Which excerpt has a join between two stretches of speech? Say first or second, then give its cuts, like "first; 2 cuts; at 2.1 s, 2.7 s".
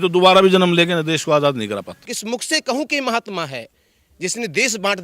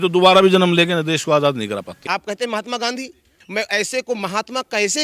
first; 1 cut; at 2.0 s